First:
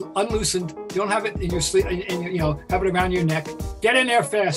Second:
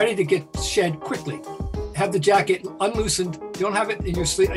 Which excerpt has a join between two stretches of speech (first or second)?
first